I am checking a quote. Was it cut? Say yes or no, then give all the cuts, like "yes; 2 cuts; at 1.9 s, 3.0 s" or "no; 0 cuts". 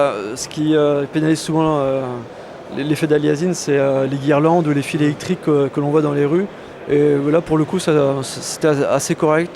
yes; 1 cut; at 4.4 s